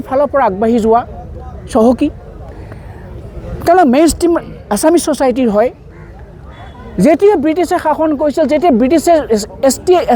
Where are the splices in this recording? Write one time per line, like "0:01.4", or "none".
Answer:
none